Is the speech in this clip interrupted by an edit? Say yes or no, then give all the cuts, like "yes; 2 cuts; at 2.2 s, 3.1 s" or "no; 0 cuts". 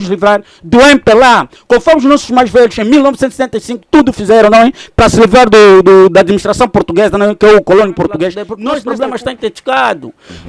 yes; 1 cut; at 8.5 s